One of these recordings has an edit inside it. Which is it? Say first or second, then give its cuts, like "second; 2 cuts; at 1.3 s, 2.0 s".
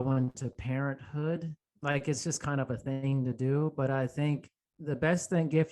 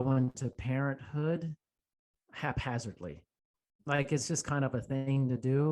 first; 1 cut; at 1.6 s